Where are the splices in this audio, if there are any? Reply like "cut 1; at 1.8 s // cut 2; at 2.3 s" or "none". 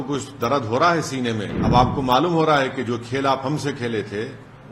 cut 1; at 1.5 s